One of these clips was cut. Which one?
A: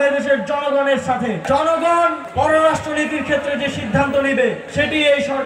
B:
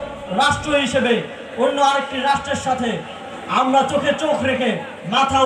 A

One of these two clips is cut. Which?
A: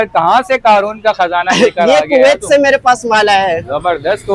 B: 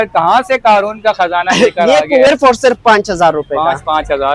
B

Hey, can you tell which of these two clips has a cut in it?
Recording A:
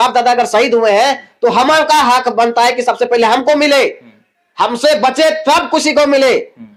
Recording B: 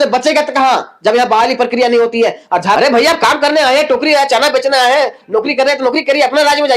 B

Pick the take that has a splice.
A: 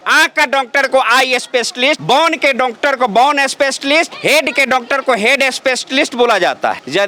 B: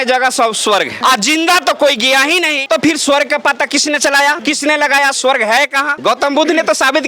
B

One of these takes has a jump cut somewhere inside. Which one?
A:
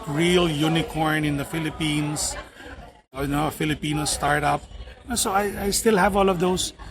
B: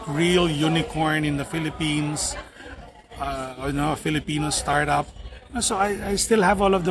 A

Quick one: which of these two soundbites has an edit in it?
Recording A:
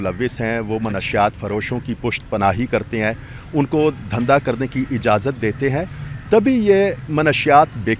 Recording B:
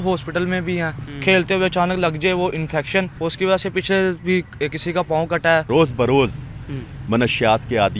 B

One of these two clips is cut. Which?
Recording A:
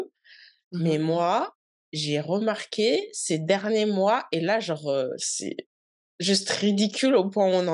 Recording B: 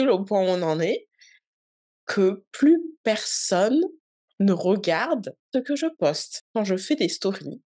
B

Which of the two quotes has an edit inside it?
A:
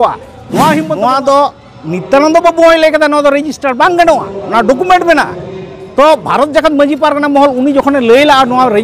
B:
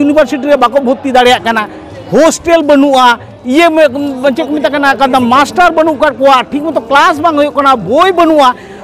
A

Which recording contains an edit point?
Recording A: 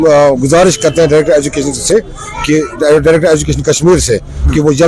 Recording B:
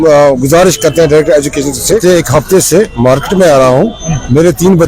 B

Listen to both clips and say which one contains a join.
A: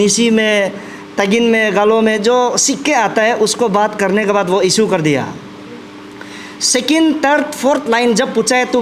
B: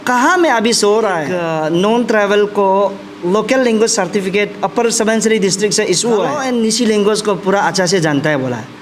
B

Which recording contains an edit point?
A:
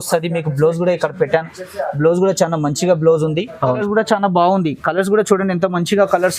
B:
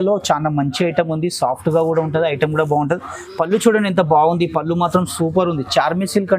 A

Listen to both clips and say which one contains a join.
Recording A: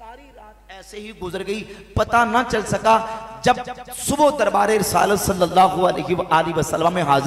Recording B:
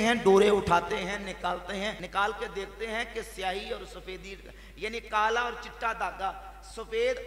B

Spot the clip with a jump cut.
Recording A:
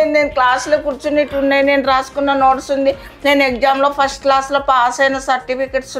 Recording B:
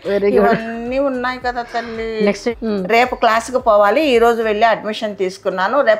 B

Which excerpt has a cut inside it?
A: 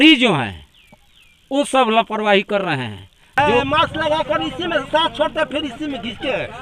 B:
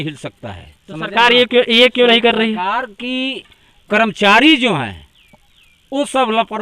A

